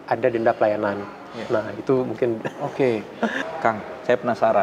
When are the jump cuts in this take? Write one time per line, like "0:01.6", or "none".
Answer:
0:03.4